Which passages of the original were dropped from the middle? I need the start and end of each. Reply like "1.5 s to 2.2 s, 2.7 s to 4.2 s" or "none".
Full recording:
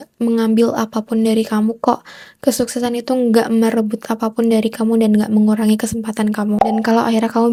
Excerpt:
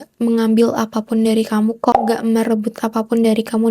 2.0 s to 3.3 s